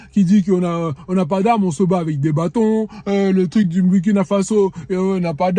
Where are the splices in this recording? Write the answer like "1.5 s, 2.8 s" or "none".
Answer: none